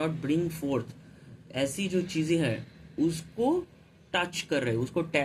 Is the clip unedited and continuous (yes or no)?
yes